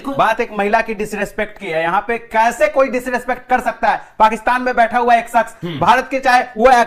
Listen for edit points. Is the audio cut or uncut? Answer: uncut